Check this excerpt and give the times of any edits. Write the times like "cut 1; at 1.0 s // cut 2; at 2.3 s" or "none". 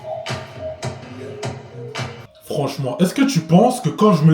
cut 1; at 1.0 s // cut 2; at 2.4 s